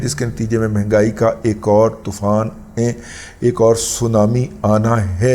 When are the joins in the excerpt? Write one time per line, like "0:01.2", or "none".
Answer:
none